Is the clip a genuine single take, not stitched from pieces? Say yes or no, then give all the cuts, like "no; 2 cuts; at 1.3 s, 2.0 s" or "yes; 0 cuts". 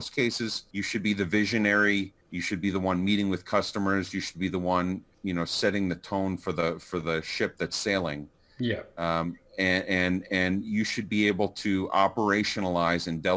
yes; 0 cuts